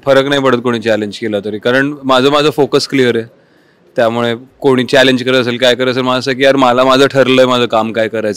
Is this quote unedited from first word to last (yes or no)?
yes